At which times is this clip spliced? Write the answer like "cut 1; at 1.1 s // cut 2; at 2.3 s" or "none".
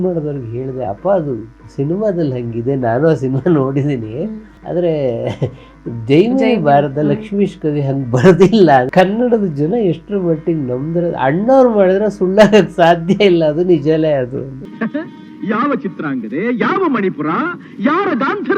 cut 1; at 8.9 s // cut 2; at 14.6 s